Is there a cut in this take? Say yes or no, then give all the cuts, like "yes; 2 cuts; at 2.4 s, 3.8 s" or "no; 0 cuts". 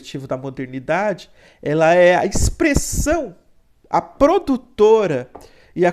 no; 0 cuts